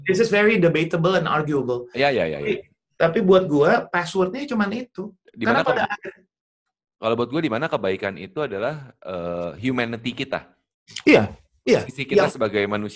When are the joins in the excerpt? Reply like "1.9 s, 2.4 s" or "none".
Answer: none